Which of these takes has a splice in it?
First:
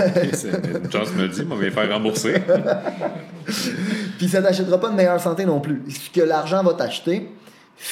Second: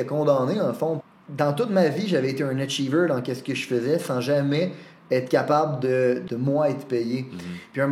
second; 2 cuts; at 1.0 s, 6.3 s

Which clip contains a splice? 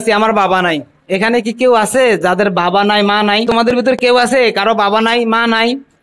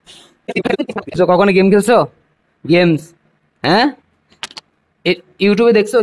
first; 1 cut; at 4.0 s

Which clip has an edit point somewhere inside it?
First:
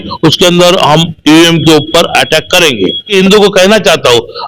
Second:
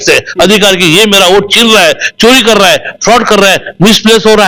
first; 1 cut; at 3.1 s

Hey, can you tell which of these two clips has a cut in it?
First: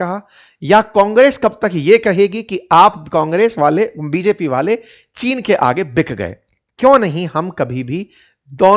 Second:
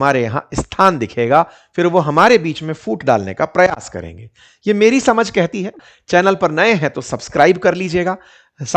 second; 1 cut; at 5.8 s

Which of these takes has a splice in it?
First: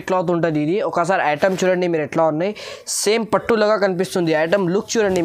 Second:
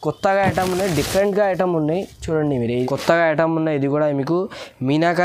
second; 1 cut; at 2.7 s

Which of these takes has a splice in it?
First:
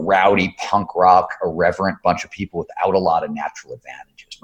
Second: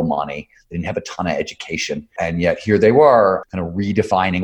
second; 2 cuts; at 2.1 s, 3.4 s

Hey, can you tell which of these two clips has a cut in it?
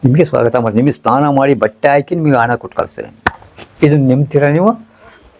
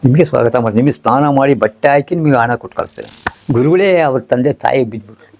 second; 1 cut; at 3.3 s

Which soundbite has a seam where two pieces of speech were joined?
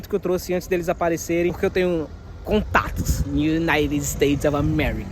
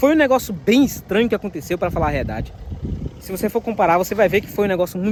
first; 1 cut; at 1.5 s

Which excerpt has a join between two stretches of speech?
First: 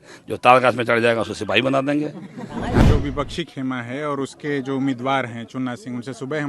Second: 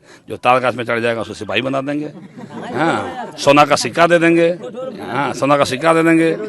first; 1 cut; at 2.8 s

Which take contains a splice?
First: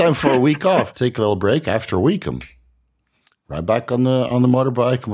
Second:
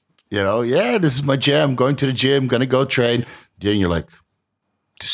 first; 1 cut; at 0.9 s

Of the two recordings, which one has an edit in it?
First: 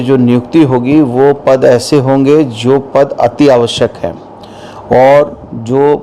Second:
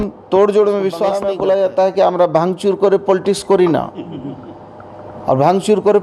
second; 1 cut; at 1.2 s

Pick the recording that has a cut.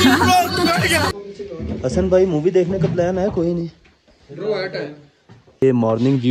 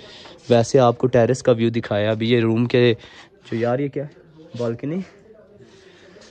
first; 2 cuts; at 1.1 s, 5.6 s

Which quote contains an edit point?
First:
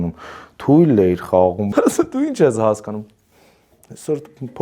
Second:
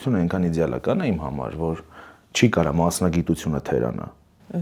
first; 1 cut; at 1.7 s

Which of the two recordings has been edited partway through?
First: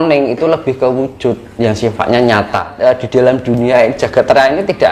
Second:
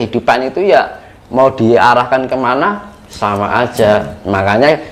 first; 1 cut; at 2.7 s

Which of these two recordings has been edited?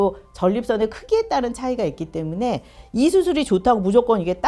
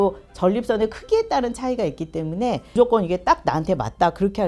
second; 1 cut; at 2.7 s

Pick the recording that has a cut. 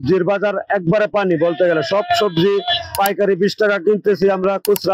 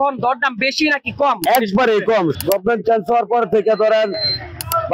second; 1 cut; at 2.4 s

